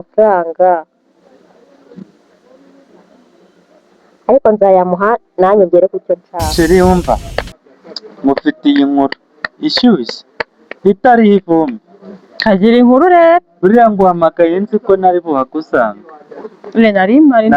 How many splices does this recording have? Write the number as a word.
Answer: one